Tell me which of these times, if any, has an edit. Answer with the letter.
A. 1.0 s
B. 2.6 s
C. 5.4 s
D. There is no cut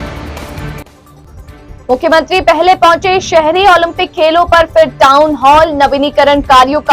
A